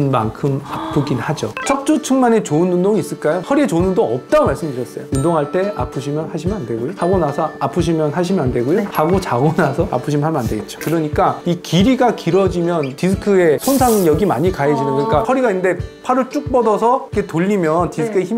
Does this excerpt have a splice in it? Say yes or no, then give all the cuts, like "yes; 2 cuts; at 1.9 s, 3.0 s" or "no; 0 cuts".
yes; 3 cuts; at 1.6 s, 5.1 s, 10.8 s